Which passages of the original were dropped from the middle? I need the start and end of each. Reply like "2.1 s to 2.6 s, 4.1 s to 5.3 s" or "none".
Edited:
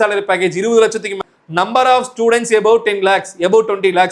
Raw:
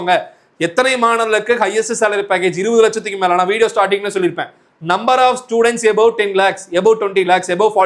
3.1 s to 4.4 s